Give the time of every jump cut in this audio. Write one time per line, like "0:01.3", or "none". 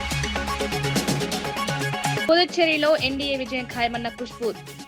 0:02.2